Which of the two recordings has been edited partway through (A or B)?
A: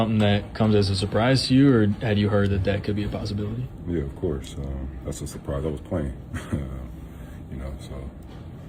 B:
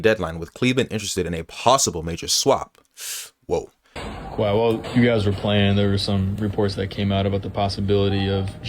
B